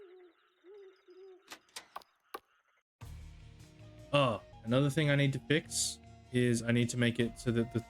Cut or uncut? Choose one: cut